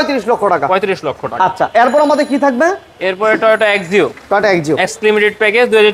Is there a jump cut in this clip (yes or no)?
no